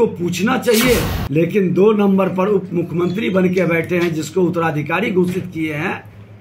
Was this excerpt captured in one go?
no; 1 cut; at 1.2 s

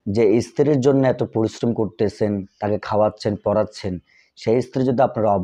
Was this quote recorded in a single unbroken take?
no; 1 cut; at 2.5 s

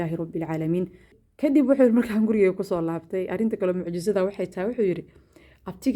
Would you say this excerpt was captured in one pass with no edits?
no; 1 cut; at 1.2 s

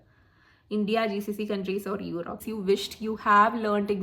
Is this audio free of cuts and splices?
no; 1 cut; at 2.4 s

